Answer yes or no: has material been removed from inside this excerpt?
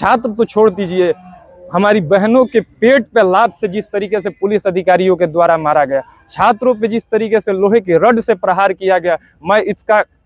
no